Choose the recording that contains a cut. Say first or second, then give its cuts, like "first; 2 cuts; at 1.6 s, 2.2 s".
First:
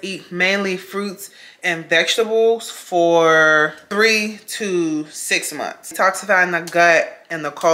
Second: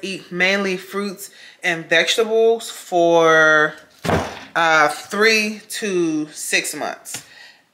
first; 2 cuts; at 3.8 s, 5.9 s